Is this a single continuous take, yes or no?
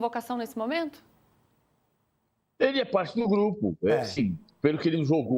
yes